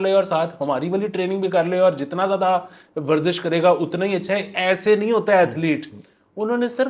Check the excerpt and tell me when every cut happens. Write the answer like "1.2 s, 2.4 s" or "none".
none